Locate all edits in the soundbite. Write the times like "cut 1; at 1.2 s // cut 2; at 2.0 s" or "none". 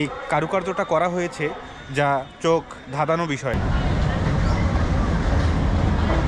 none